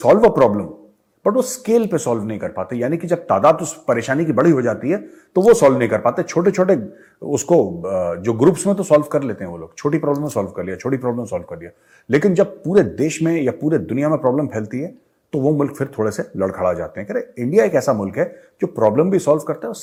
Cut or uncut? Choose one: uncut